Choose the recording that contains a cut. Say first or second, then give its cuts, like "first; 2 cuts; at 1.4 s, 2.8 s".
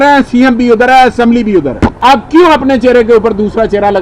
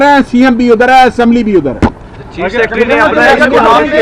first; 1 cut; at 1.9 s